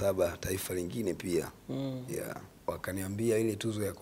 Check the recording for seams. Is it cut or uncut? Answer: cut